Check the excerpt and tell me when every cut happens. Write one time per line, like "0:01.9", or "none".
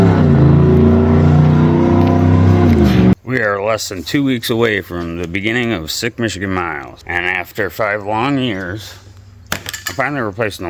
0:03.1
0:06.9